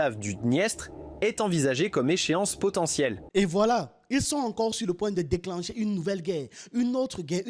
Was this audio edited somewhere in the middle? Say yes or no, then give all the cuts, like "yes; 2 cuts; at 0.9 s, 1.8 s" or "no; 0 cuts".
no; 0 cuts